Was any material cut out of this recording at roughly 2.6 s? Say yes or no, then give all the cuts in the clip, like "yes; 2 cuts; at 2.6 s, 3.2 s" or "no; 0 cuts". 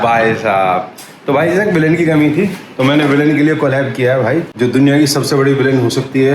no; 1 cut; at 4.5 s